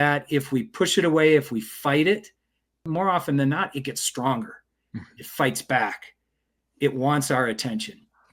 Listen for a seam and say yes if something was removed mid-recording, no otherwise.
yes